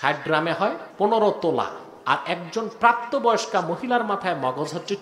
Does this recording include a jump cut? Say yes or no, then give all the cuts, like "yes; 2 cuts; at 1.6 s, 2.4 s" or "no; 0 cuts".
yes; 2 cuts; at 0.8 s, 1.9 s